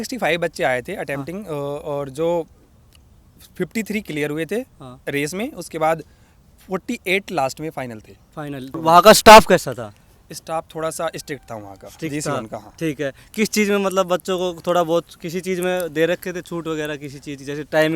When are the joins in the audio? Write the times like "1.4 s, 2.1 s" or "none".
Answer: 8.8 s